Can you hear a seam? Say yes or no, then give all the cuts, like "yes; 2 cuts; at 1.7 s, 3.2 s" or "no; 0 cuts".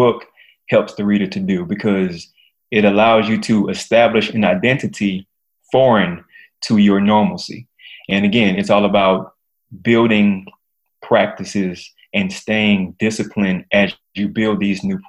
yes; 1 cut; at 3.4 s